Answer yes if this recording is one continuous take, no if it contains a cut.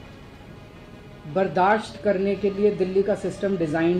yes